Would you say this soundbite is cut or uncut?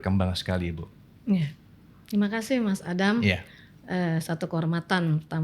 uncut